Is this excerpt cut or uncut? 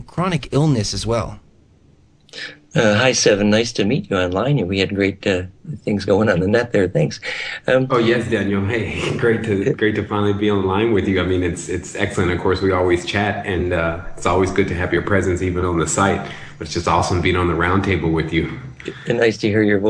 cut